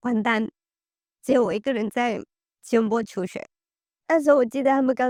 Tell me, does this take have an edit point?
no; 0 cuts

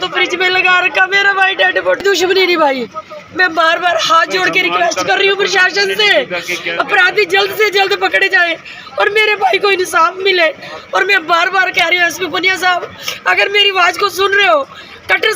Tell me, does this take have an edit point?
yes; 1 cut; at 2.0 s

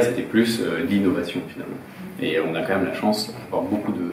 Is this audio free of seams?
yes; 0 cuts

